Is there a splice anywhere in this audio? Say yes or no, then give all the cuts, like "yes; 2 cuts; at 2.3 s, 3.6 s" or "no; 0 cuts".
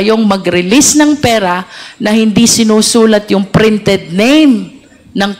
no; 0 cuts